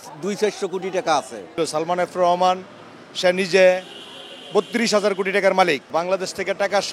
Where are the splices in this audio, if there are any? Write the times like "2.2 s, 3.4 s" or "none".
1.5 s, 5.9 s